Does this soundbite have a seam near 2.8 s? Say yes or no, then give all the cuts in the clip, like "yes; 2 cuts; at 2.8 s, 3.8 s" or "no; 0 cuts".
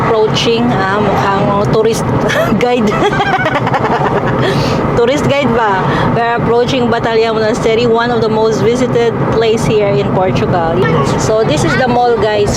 no; 1 cut; at 10.8 s